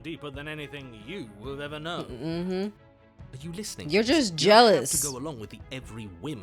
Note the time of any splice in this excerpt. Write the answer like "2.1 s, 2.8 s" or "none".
none